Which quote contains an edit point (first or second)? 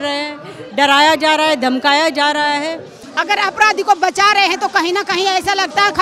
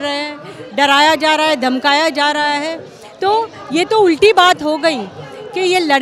first